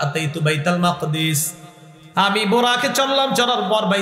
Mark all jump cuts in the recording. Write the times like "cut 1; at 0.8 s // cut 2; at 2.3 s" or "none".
none